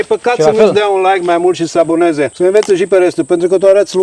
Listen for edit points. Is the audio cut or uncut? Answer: cut